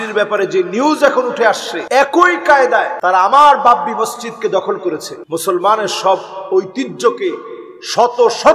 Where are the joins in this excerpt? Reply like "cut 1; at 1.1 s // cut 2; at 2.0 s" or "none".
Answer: cut 1; at 1.7 s // cut 2; at 2.9 s // cut 3; at 5.1 s